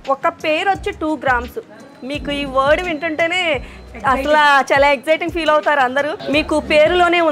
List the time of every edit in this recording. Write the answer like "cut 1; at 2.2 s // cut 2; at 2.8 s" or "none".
cut 1; at 6.2 s